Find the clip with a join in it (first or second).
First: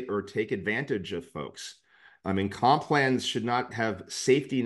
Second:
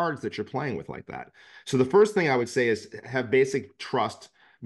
first